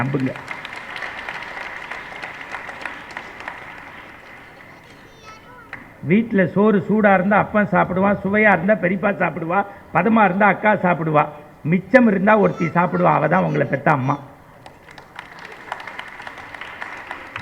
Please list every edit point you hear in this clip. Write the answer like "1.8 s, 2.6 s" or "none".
none

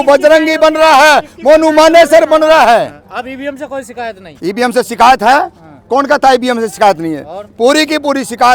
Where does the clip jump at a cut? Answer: none

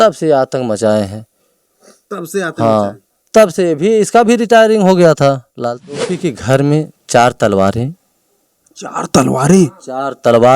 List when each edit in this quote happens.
5.9 s

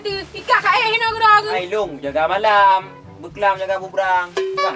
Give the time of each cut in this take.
none

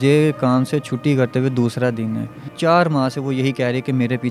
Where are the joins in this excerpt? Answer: 2.4 s

